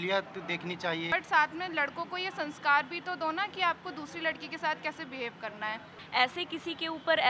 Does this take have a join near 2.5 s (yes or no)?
no